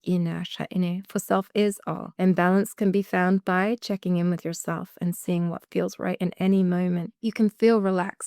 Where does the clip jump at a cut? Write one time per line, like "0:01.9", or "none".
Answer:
0:02.0
0:07.1